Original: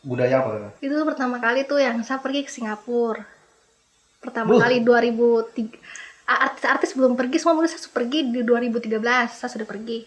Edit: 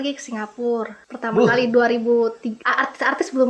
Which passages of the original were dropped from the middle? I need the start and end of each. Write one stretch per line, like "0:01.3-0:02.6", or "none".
0:03.3-0:04.2
0:05.7-0:06.2